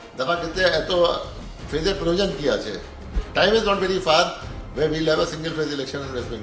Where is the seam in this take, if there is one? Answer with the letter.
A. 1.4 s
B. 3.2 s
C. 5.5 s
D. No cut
B